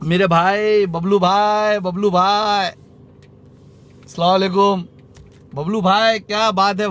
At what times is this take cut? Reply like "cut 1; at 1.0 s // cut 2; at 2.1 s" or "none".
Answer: none